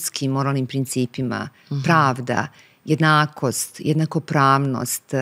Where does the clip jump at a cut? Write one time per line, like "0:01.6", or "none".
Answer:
none

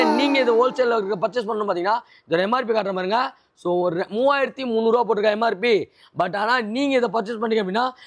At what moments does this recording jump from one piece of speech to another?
none

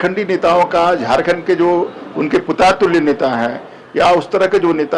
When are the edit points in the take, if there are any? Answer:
none

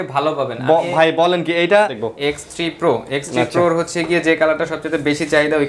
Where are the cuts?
0:02.0

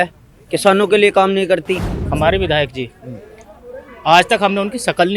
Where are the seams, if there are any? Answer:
0:01.9

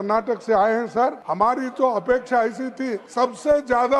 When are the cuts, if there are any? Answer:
0:01.2
0:03.0

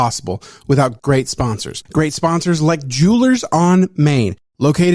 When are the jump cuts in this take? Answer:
0:01.5

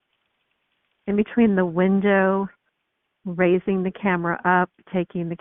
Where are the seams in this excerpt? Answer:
none

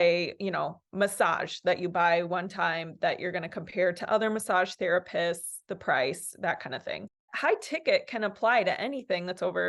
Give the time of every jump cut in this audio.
0:07.3

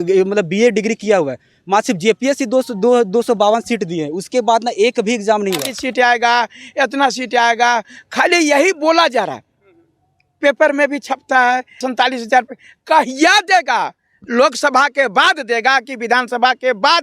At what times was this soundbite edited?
0:05.7
0:11.9

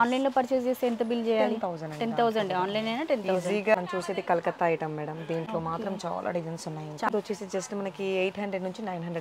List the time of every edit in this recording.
0:03.7
0:07.1

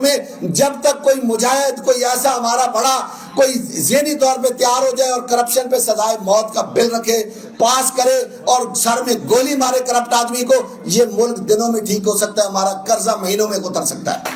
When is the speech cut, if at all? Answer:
none

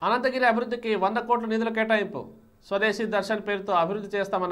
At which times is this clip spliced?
none

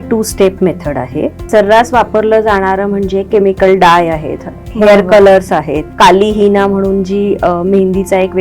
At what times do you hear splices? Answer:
0:01.4
0:05.9

